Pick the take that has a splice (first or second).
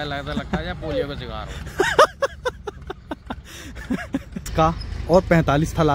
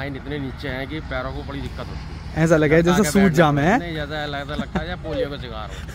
first